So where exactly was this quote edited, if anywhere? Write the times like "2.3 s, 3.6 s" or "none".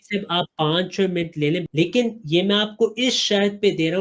1.6 s